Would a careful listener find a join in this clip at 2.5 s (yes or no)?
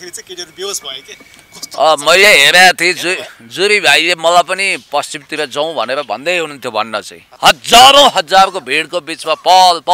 no